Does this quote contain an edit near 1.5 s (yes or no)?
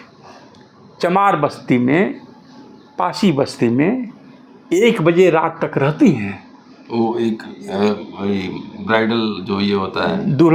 no